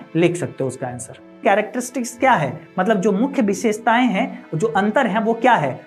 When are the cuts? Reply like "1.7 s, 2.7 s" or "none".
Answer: 1.4 s

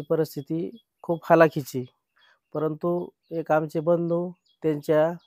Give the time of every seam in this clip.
none

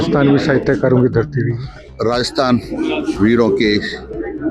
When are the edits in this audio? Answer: 1.8 s

